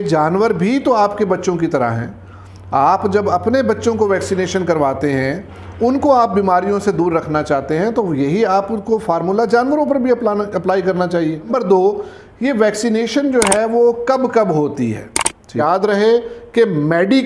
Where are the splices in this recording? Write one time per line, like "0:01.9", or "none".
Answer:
0:11.5
0:15.6